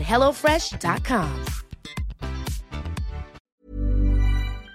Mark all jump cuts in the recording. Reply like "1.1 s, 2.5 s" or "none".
3.4 s